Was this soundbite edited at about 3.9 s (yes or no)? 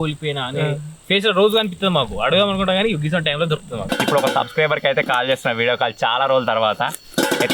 yes